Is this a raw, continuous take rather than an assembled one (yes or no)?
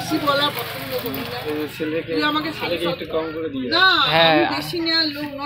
yes